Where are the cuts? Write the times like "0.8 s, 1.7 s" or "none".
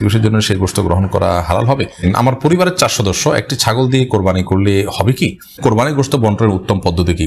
2.0 s, 5.6 s